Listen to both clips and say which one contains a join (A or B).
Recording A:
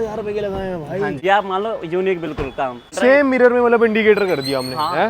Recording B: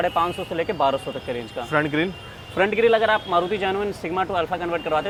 A